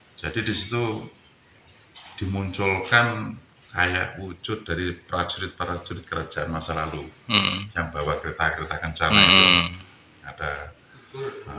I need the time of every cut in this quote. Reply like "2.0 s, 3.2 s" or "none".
none